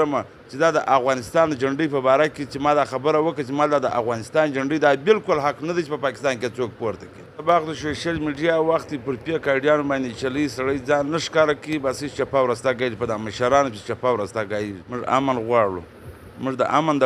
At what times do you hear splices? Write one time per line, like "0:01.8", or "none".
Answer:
0:07.4
0:14.9